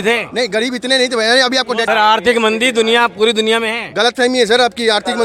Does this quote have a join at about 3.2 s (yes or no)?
no